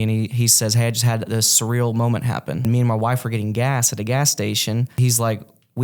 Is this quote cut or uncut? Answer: cut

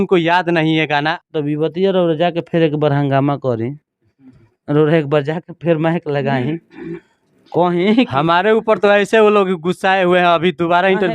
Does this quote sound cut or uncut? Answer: cut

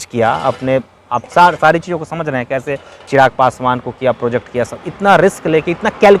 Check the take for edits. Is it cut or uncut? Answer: uncut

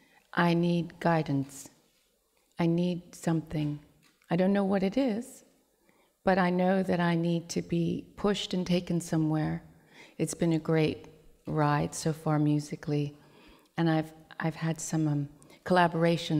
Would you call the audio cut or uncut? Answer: cut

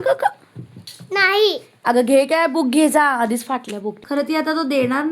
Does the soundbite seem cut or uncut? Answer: cut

